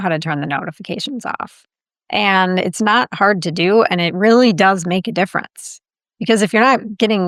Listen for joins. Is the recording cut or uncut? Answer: uncut